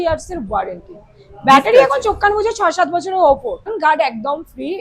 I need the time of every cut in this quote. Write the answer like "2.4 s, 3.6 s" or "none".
3.7 s

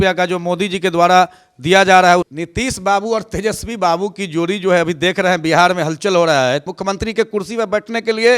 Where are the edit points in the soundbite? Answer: 2.3 s, 6.7 s

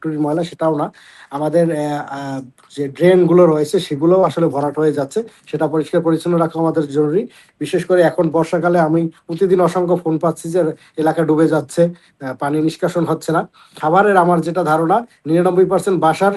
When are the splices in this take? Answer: 13.6 s

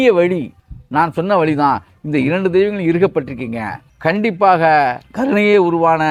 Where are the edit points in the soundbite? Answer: none

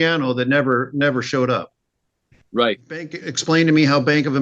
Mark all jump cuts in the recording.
3.2 s

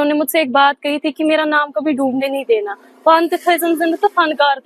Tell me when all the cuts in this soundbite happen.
none

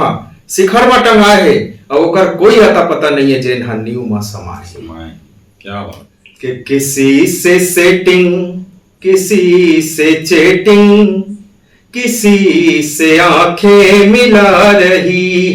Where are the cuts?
6.3 s

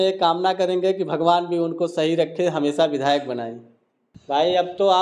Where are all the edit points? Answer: none

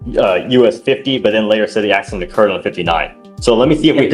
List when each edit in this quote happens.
none

